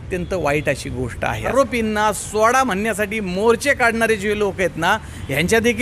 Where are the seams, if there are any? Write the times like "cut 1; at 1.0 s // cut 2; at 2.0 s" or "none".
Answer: cut 1; at 1.5 s